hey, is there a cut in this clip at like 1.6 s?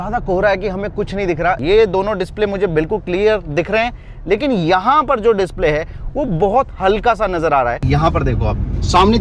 yes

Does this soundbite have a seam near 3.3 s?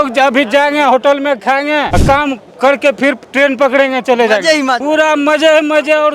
no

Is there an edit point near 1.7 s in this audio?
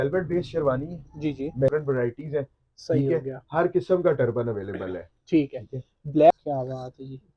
yes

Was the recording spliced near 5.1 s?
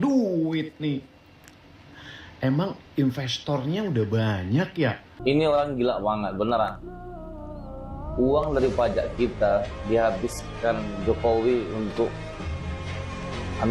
yes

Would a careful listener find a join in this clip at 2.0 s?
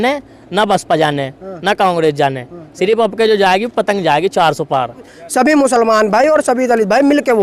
no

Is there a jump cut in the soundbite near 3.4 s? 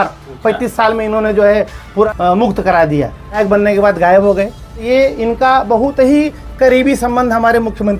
yes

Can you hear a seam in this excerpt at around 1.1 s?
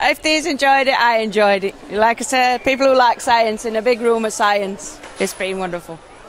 no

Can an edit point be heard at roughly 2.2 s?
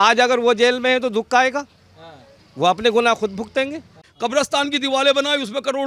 no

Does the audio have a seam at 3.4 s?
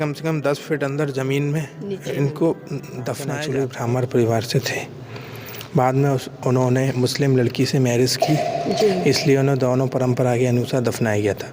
yes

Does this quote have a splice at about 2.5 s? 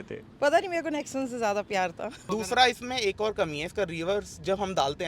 yes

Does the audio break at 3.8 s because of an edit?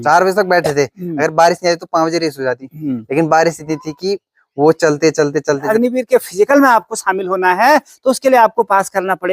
no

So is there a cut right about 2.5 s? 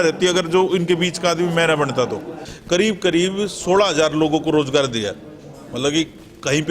yes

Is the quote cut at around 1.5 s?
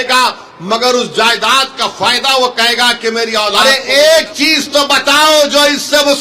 no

